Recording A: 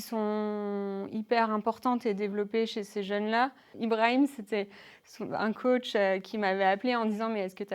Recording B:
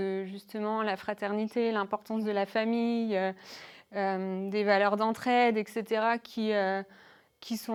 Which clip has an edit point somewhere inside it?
A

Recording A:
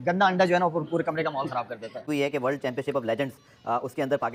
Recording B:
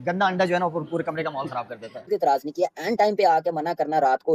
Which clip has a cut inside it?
B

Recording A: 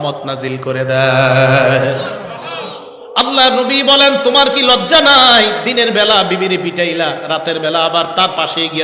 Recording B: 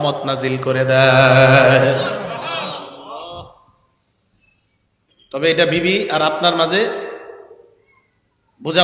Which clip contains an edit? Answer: A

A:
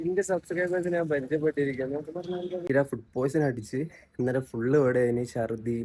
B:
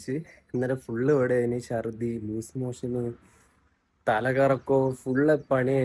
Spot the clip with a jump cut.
A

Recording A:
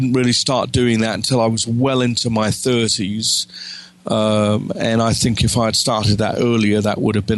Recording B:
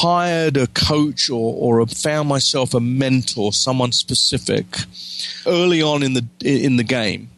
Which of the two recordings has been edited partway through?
B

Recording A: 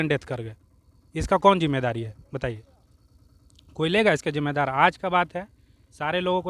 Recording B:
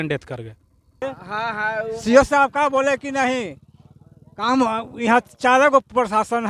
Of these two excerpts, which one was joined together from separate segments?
B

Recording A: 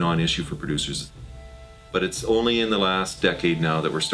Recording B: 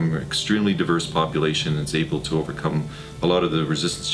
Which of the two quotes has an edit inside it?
A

